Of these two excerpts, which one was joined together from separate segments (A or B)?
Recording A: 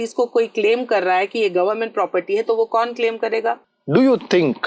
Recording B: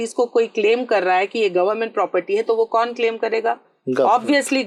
A